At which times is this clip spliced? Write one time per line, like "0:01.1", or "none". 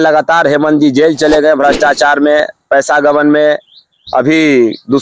none